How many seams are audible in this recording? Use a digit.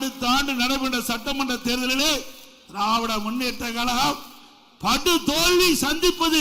0